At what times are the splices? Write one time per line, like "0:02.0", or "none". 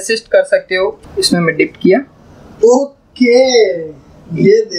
0:01.0

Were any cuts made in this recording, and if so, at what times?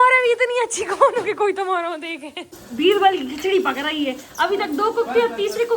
0:02.6

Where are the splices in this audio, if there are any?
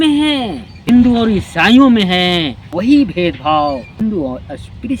0:00.9
0:02.6
0:04.0

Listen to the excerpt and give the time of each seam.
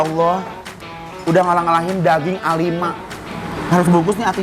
0:03.1

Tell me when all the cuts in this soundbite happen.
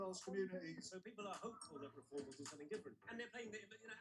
0:01.2
0:03.0

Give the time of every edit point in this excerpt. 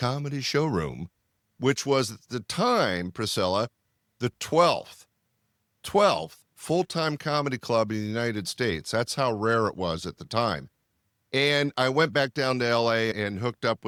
none

